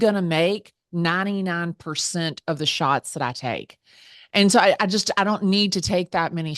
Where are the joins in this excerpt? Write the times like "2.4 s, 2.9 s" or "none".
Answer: none